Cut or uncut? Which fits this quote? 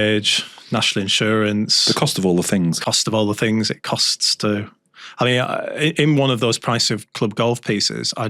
uncut